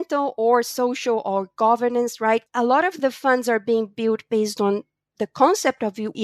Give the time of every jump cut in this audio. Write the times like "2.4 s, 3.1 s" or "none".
2.5 s